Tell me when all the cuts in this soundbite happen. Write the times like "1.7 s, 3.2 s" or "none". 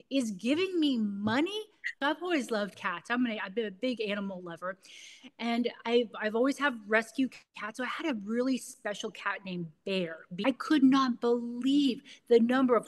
2.0 s, 10.3 s